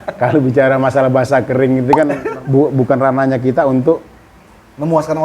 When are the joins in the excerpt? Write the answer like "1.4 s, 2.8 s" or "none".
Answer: 2.2 s